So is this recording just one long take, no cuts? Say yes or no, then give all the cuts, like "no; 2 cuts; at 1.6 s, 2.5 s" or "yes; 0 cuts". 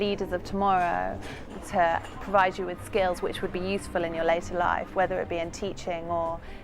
no; 1 cut; at 1.5 s